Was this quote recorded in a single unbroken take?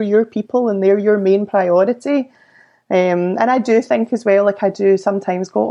yes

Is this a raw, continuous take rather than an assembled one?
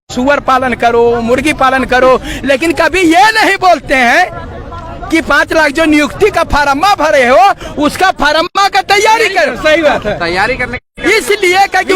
yes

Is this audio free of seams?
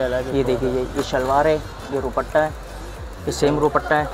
yes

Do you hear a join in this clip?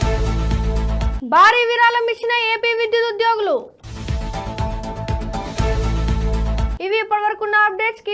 no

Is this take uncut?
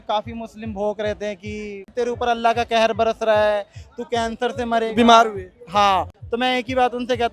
no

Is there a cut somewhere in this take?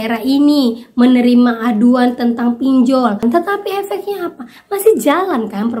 yes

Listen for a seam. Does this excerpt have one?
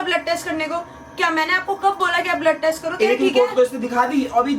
no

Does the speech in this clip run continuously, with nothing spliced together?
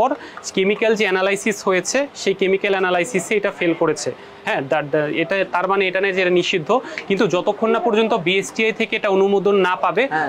yes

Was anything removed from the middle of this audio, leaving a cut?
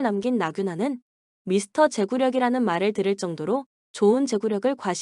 yes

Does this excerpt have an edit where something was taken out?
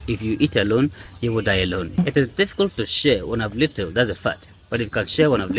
yes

